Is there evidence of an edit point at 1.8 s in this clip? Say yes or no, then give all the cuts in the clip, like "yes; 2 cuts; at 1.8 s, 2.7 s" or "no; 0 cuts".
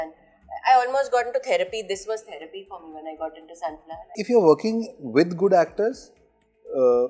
no; 1 cut; at 4.1 s